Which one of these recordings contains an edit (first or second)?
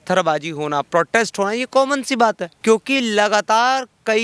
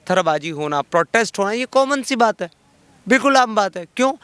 first